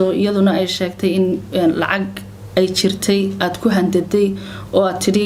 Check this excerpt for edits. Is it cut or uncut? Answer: uncut